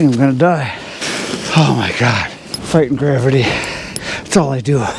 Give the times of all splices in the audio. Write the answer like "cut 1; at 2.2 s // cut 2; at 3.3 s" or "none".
cut 1; at 1.0 s // cut 2; at 2.5 s